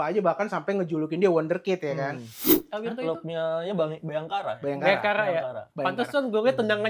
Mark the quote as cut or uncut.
cut